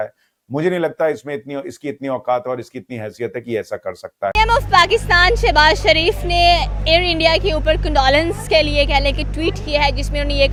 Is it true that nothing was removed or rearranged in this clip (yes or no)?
yes